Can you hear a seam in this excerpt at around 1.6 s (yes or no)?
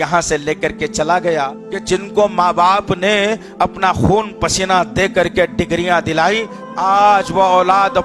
yes